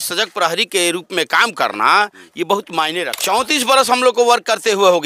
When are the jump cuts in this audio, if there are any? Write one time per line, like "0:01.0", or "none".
0:03.1